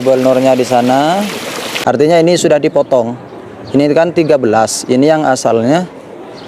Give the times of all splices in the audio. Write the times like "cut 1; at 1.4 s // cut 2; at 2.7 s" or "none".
cut 1; at 1.7 s

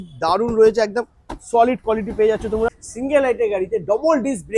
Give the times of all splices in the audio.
cut 1; at 2.8 s

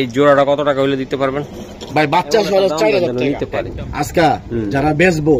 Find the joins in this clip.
cut 1; at 3.1 s

